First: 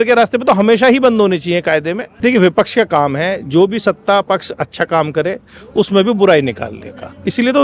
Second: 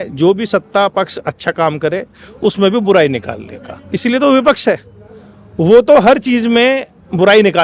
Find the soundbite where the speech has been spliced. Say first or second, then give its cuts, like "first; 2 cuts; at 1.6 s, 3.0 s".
first; 1 cut; at 2.0 s